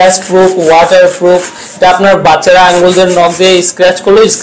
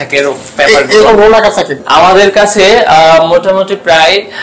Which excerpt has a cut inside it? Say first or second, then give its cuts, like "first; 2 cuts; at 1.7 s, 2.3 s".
second; 1 cut; at 1.8 s